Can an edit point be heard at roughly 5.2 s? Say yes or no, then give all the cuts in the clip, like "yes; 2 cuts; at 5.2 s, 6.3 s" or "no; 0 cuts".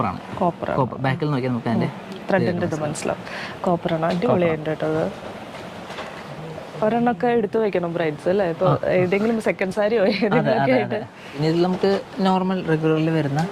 no; 0 cuts